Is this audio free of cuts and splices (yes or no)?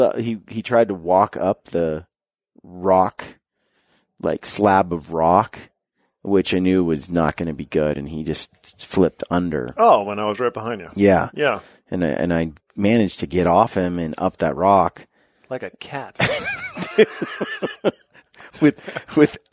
yes